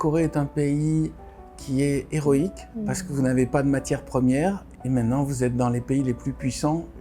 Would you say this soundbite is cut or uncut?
cut